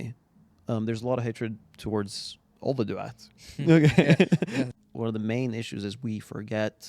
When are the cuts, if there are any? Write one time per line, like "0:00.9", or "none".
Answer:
0:04.8